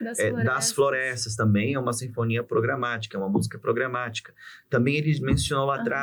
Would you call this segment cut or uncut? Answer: uncut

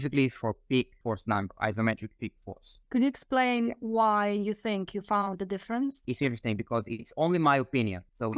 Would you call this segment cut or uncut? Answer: cut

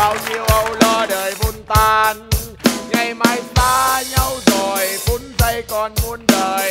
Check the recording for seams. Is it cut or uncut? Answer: uncut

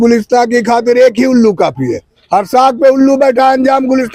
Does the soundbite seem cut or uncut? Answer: uncut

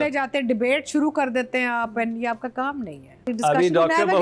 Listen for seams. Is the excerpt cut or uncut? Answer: cut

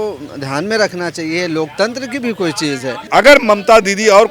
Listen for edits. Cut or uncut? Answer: cut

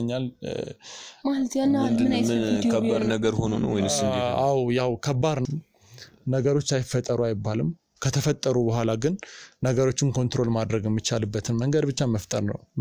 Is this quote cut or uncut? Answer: cut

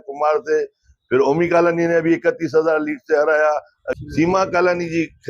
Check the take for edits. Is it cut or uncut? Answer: cut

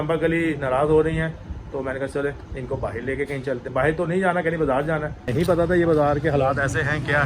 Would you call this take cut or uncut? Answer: cut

